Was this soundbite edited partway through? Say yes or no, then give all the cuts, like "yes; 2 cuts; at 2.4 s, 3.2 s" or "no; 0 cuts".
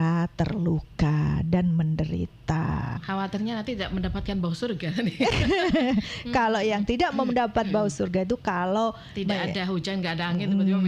yes; 1 cut; at 3.0 s